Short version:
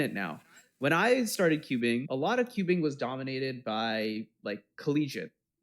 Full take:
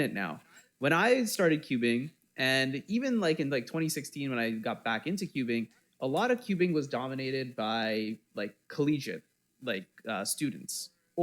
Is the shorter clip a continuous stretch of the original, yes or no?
no